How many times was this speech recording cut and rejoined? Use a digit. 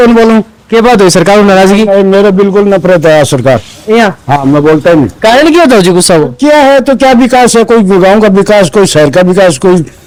0